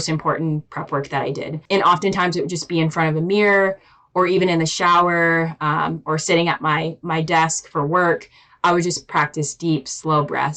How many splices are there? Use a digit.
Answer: 1